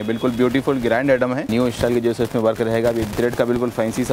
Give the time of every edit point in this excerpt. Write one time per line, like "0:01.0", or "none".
0:01.5
0:03.1